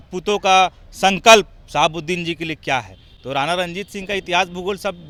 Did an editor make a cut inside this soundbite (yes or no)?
no